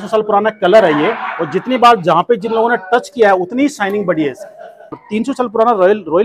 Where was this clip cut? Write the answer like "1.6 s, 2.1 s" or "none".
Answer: 4.9 s